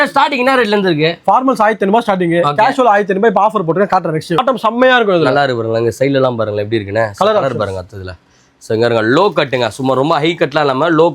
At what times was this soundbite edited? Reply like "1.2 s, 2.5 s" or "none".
4.4 s